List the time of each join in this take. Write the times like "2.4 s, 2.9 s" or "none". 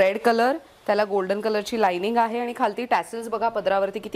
none